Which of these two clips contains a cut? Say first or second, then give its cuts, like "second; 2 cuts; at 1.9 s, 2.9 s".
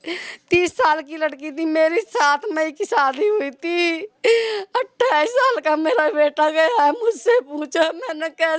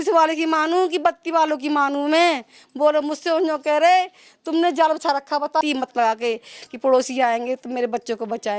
second; 1 cut; at 5.6 s